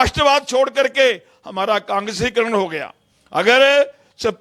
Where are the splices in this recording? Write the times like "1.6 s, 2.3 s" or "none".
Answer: none